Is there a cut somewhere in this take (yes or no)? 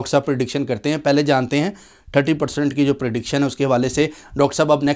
no